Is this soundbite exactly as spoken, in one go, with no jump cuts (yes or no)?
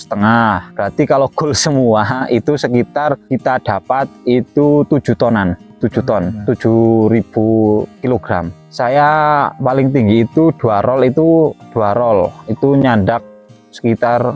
yes